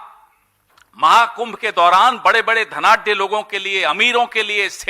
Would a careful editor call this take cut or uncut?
uncut